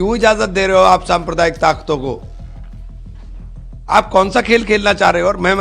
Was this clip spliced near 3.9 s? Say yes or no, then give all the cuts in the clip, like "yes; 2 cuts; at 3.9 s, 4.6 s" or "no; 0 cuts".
yes; 2 cuts; at 2.5 s, 3.9 s